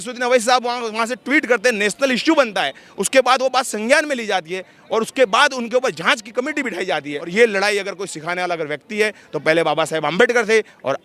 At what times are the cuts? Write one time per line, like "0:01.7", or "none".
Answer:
0:07.3